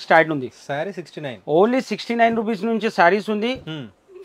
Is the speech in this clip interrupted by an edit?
no; 0 cuts

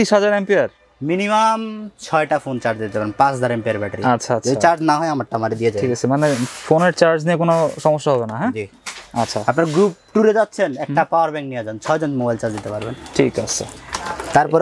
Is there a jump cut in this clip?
no; 0 cuts

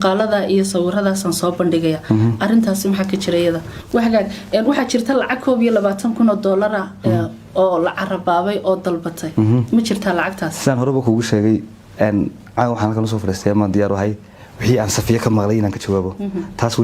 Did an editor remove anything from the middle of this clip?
yes; 1 cut; at 3.7 s

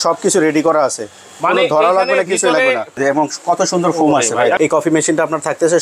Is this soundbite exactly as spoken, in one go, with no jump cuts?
no; 2 cuts; at 3.0 s, 4.6 s

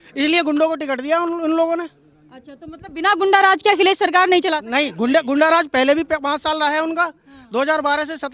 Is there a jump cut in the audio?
no; 0 cuts

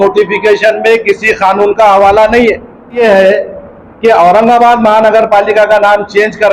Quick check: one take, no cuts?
no; 1 cut; at 3.0 s

